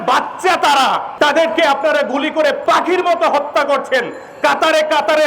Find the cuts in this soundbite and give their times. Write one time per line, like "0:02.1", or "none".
0:01.1
0:02.6